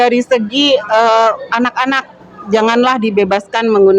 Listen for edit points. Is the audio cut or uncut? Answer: uncut